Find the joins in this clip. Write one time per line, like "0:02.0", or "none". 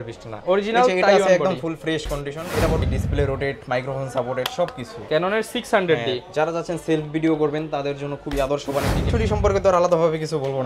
0:02.8
0:09.0